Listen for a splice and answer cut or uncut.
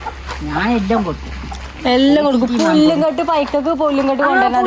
uncut